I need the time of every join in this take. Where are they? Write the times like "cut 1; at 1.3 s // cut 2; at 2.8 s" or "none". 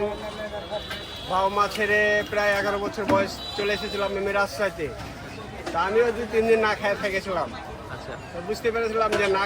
none